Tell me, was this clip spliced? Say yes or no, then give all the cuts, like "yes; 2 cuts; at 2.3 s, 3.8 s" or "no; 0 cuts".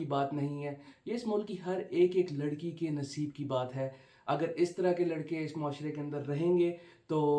no; 0 cuts